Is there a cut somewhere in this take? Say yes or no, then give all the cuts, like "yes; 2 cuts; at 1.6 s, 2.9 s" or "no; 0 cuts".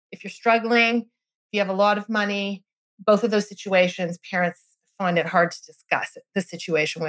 no; 0 cuts